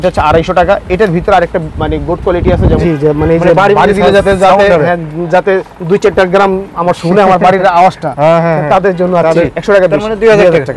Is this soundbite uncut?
no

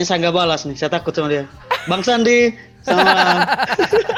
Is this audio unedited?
yes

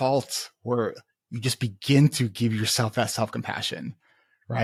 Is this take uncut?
yes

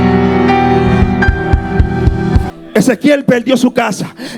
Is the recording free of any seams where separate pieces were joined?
no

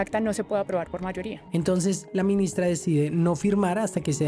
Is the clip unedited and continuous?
yes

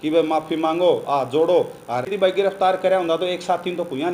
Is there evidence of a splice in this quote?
yes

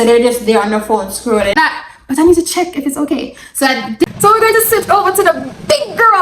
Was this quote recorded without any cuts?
no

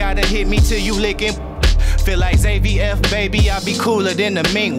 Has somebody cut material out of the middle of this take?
no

